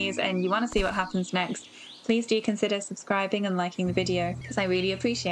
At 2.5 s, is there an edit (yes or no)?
no